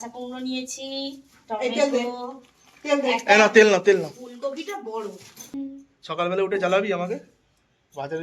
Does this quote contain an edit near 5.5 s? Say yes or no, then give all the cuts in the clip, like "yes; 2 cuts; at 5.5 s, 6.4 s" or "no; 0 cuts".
yes; 1 cut; at 5.5 s